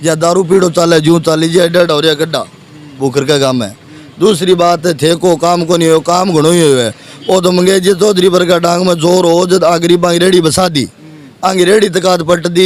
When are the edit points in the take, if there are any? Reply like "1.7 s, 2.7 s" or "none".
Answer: none